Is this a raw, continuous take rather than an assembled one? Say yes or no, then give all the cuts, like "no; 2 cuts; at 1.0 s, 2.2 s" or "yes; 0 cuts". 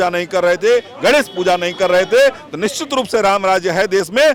yes; 0 cuts